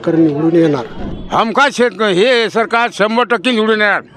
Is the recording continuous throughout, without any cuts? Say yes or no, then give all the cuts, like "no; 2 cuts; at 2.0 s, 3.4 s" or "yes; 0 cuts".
no; 1 cut; at 1.1 s